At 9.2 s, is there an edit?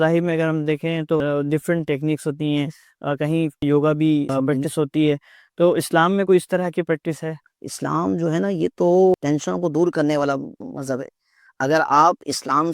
yes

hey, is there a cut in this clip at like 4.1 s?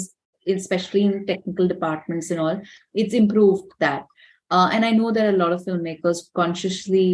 no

